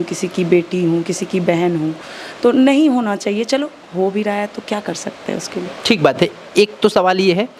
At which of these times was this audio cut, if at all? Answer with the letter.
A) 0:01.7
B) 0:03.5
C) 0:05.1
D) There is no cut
D